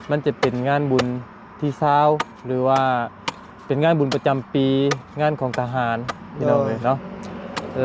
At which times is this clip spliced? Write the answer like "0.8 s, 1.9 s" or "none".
none